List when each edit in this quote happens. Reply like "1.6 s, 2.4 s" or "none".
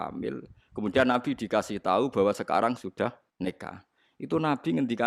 3.2 s